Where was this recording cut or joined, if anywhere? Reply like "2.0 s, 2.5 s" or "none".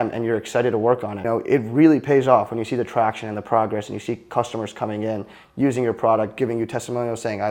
1.2 s

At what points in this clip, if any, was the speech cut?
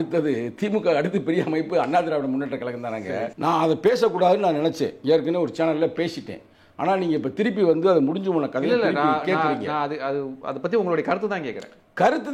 3.3 s

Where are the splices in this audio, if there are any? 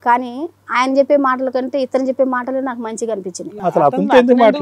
3.5 s

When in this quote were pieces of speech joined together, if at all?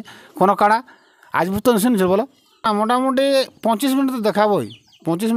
2.6 s

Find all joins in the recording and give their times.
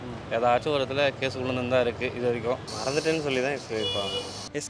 2.6 s

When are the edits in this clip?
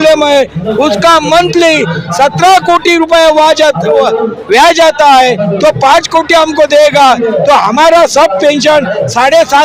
none

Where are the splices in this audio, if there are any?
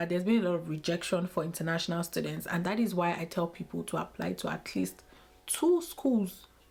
none

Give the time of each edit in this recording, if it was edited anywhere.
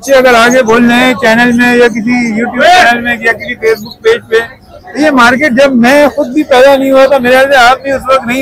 none

